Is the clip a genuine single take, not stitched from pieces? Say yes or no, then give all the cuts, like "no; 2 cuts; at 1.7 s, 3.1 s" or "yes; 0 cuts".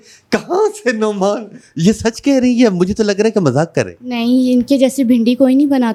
yes; 0 cuts